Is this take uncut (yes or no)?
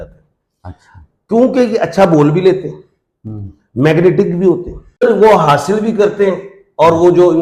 no